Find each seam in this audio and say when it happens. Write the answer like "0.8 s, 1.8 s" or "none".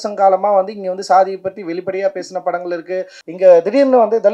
3.2 s

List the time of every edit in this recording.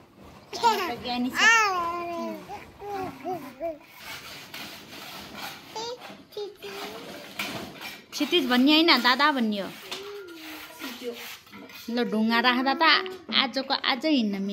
none

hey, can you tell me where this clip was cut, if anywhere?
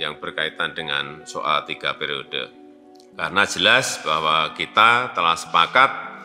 3.0 s

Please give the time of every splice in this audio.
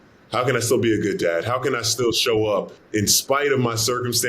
2.8 s

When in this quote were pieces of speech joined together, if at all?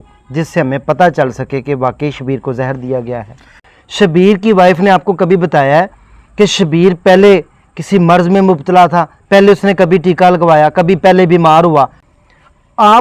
3.7 s, 12.0 s

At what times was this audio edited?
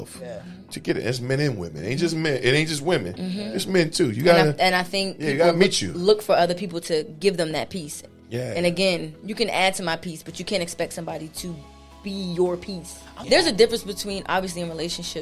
13.2 s

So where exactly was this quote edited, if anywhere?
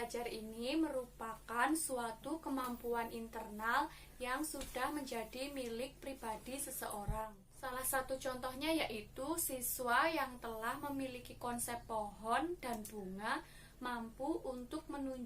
7.4 s

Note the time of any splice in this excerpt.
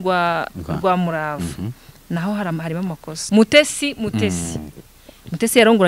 3.1 s

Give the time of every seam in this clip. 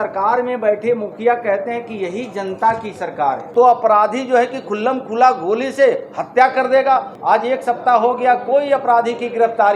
3.4 s, 7.1 s

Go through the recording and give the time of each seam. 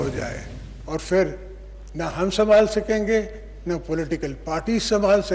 none

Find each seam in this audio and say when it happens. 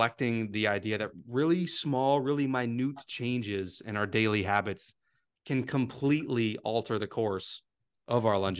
none

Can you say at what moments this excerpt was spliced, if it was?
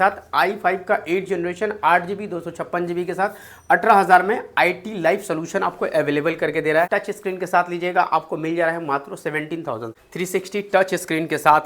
6.9 s, 9.9 s

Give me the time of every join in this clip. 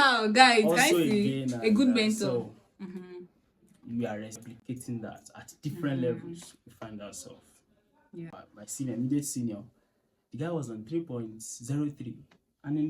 4.5 s, 8.3 s

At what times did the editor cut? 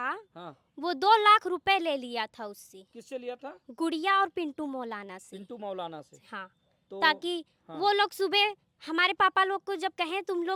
none

